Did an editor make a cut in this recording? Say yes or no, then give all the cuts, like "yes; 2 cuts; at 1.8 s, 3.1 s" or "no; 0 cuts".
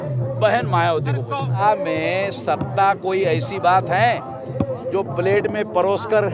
yes; 1 cut; at 1.6 s